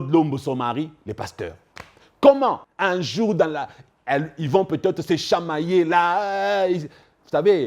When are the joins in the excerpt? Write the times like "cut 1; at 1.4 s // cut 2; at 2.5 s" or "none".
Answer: cut 1; at 2.7 s